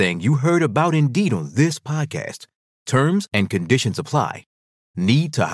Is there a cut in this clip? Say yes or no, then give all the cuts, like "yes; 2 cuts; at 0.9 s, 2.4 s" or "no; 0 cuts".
no; 0 cuts